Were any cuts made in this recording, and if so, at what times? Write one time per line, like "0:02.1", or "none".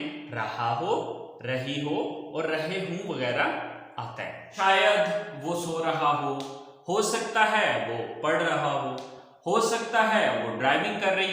0:04.4